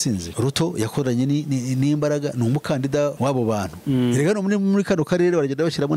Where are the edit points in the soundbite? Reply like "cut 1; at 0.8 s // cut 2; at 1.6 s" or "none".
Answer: none